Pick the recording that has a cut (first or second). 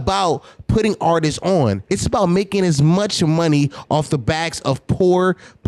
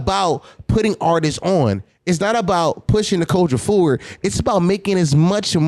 first